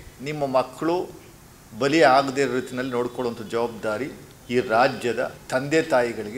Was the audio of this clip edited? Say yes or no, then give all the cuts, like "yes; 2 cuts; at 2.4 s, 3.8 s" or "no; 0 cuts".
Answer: yes; 2 cuts; at 4.3 s, 5.4 s